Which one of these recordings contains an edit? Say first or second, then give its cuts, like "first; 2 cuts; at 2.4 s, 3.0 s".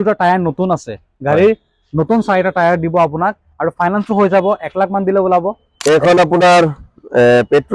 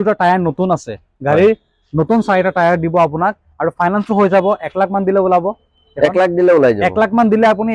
first; 1 cut; at 5.7 s